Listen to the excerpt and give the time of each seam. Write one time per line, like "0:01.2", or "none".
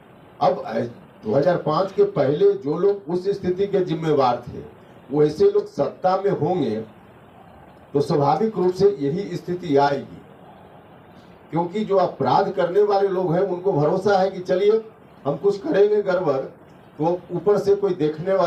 none